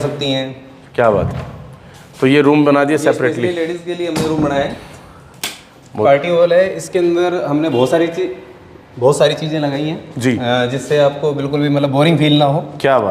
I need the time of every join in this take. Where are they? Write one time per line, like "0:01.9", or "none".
0:06.0